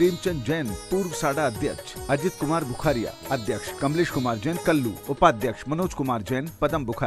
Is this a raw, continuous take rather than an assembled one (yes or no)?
no